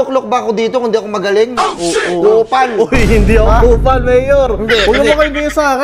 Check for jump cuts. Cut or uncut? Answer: uncut